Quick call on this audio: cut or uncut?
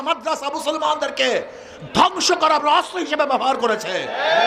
uncut